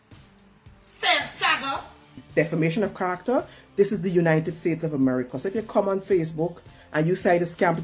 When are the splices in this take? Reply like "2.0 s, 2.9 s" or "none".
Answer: 2.3 s